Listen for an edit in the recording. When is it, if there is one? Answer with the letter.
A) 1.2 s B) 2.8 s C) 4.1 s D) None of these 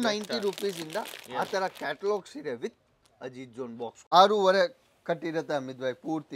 C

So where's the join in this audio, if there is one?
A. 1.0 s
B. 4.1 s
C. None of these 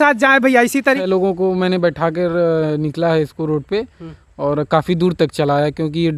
A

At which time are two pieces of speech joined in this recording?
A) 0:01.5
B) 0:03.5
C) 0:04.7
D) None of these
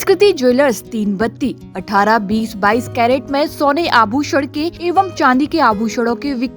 C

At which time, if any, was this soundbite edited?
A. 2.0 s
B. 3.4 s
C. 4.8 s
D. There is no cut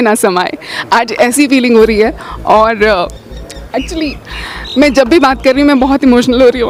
D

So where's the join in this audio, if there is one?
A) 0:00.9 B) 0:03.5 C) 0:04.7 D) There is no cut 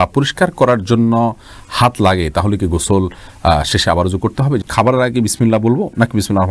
C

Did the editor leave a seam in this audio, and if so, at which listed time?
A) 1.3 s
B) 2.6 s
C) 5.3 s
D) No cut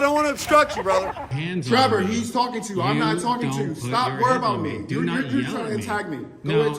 A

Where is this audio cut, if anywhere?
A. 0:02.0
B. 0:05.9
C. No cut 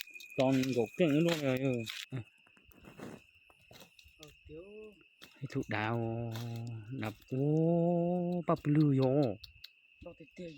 A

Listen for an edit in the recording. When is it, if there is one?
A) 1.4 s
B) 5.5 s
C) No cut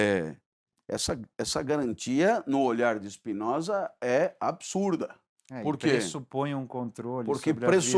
C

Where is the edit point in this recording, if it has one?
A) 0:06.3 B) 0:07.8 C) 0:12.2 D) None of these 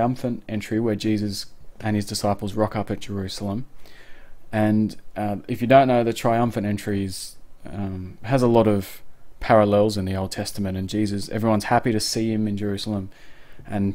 A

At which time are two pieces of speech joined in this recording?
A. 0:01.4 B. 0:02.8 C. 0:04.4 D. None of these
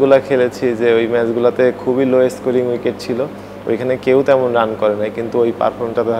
D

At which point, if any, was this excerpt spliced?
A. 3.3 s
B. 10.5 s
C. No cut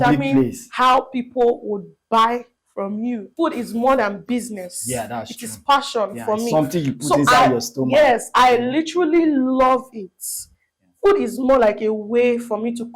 A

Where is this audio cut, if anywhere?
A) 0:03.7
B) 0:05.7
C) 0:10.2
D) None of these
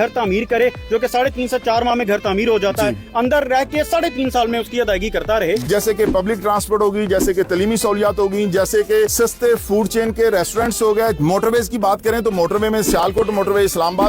B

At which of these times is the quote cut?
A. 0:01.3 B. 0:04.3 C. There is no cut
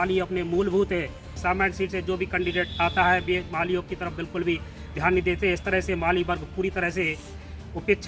A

